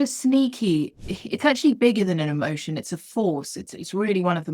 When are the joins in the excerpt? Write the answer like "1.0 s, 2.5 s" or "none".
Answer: 1.0 s